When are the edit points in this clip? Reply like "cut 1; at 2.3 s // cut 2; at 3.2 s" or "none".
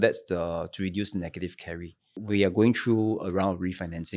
cut 1; at 2.2 s